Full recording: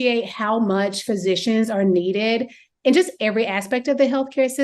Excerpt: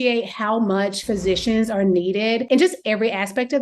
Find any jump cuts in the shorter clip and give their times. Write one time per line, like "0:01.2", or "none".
0:02.4